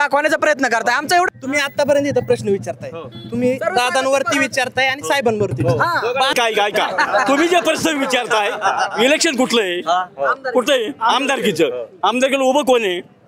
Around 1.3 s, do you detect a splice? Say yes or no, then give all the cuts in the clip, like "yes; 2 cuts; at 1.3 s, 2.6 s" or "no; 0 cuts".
yes; 2 cuts; at 1.3 s, 6.3 s